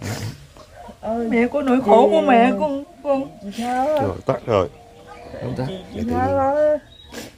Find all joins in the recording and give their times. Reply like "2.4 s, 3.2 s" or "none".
none